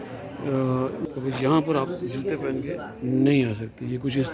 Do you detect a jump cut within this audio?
yes; 1 cut; at 1.0 s

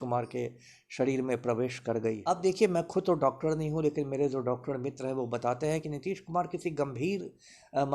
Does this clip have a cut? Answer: yes; 1 cut; at 2.2 s

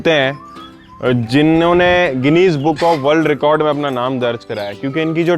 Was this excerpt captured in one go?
yes; 0 cuts

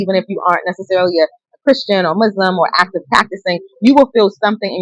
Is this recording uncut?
yes; 0 cuts

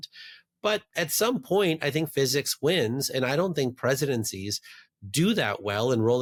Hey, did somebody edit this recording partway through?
no; 0 cuts

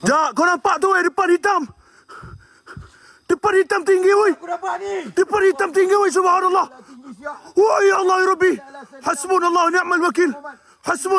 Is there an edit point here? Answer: no; 0 cuts

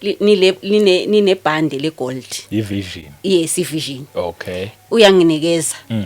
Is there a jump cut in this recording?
no; 0 cuts

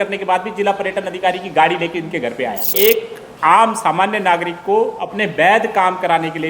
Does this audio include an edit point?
yes; 1 cut; at 2.7 s

